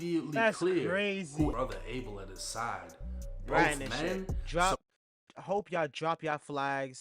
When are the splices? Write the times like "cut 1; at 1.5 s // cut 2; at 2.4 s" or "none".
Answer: cut 1; at 1.5 s